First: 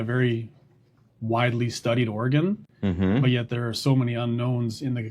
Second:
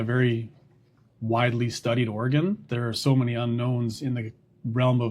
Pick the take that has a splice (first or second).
second